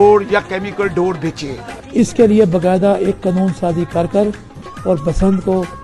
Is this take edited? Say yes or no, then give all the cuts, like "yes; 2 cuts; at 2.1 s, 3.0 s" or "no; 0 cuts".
yes; 1 cut; at 1.7 s